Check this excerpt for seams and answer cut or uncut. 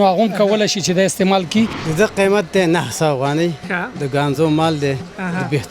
cut